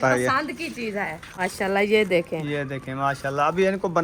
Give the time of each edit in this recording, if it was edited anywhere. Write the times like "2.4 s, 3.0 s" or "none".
1.4 s